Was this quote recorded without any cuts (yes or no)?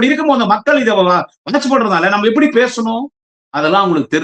yes